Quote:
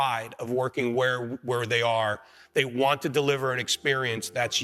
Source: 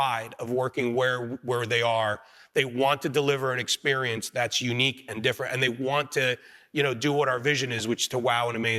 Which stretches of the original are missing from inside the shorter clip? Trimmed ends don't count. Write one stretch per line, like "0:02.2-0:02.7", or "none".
none